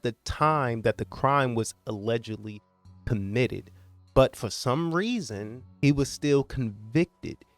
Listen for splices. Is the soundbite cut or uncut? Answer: cut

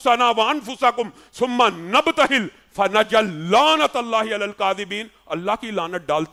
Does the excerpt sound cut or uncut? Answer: uncut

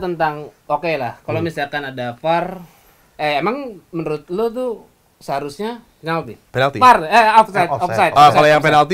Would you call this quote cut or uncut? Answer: cut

